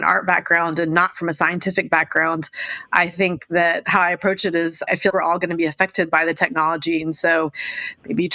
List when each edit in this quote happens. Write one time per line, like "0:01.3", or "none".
none